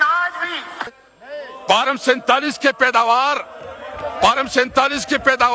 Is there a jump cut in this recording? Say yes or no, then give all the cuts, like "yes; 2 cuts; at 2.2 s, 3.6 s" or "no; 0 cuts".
yes; 1 cut; at 1.0 s